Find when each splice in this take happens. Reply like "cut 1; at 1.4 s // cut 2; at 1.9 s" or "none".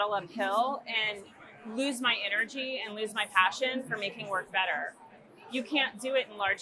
none